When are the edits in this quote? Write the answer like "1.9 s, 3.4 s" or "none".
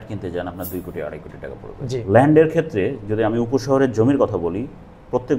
2.0 s